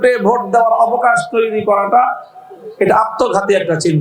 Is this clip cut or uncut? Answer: uncut